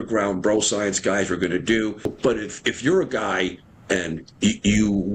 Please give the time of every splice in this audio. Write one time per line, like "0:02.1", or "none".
0:02.1